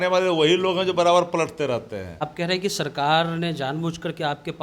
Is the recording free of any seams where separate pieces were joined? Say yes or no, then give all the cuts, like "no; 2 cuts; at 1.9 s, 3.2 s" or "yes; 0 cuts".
no; 1 cut; at 2.2 s